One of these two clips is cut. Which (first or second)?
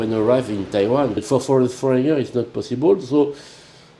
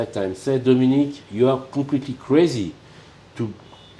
first